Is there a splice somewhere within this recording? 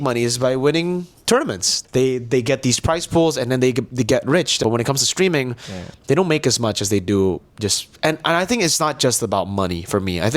yes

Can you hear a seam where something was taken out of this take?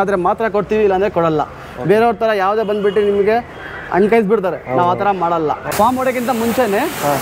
yes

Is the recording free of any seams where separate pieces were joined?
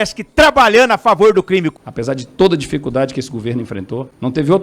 no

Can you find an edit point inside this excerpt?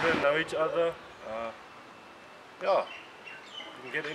no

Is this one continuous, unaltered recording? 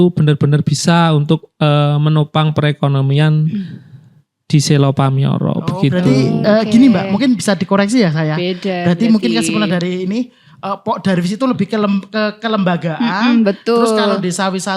yes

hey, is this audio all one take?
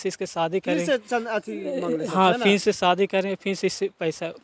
yes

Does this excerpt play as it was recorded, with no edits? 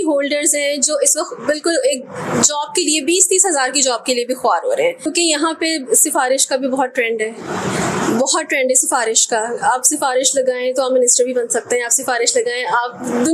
yes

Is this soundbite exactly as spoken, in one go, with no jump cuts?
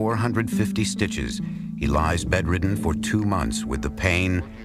no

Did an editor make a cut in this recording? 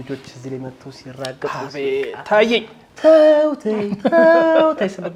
no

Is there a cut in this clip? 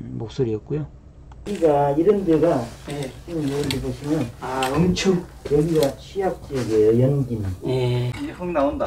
no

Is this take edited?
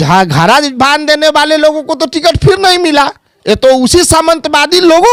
no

